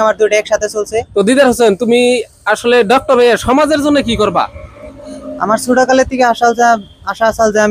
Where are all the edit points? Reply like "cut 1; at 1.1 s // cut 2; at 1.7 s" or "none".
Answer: cut 1; at 1.1 s